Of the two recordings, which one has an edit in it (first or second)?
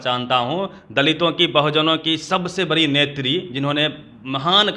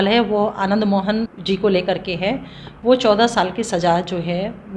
second